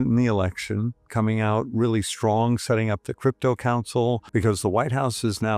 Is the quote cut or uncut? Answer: cut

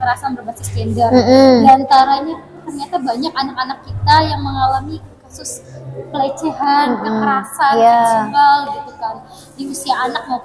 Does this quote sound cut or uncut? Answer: uncut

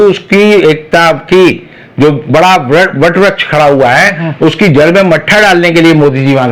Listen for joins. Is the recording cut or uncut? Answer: uncut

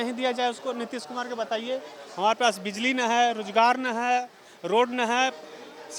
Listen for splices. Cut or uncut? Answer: uncut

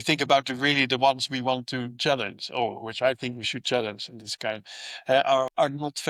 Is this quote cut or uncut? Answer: uncut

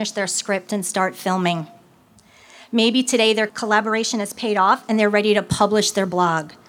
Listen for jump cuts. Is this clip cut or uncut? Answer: cut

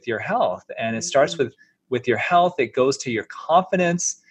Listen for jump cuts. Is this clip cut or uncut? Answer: uncut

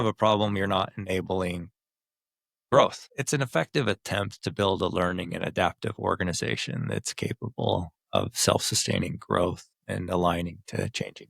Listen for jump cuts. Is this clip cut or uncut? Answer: cut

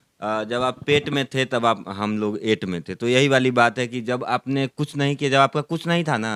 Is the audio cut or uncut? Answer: uncut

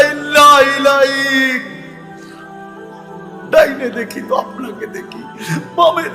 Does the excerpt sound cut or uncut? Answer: cut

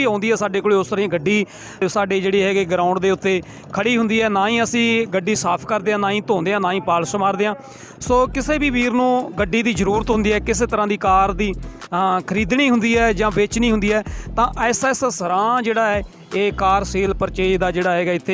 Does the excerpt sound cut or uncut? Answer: cut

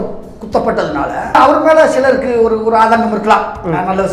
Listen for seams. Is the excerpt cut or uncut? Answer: cut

